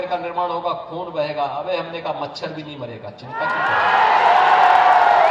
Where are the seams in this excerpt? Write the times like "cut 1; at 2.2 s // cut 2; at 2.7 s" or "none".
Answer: none

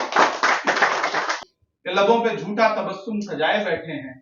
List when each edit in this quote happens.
cut 1; at 1.3 s

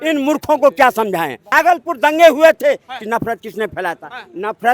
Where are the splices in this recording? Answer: cut 1; at 1.4 s

